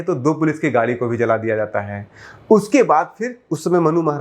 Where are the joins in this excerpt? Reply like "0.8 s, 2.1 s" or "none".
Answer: none